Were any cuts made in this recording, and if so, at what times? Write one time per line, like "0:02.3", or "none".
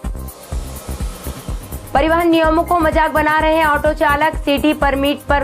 0:01.4